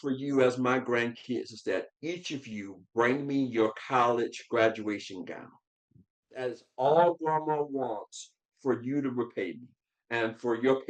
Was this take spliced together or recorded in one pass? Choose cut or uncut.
uncut